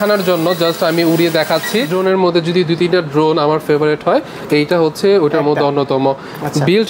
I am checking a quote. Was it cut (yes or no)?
yes